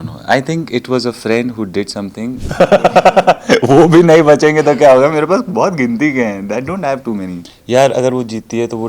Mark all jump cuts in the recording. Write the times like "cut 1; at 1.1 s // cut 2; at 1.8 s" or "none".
cut 1; at 2.4 s // cut 2; at 7.5 s